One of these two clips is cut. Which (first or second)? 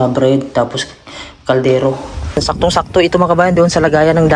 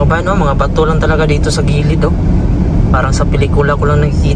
first